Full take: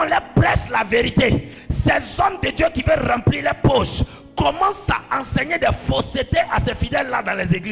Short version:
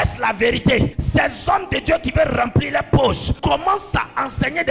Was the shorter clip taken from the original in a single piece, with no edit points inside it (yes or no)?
no